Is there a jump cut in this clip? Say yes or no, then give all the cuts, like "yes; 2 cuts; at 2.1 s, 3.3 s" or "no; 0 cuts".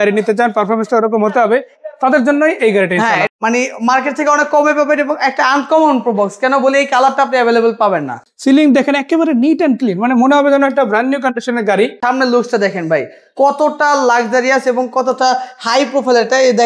yes; 3 cuts; at 3.3 s, 8.2 s, 12.0 s